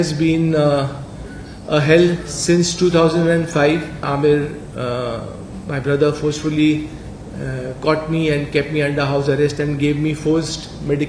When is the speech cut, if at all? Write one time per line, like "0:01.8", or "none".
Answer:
0:04.0